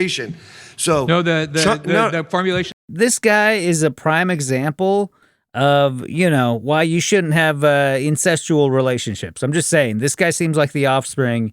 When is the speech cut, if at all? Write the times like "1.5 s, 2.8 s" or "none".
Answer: 2.8 s